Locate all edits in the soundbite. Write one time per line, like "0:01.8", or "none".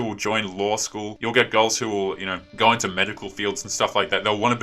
0:01.1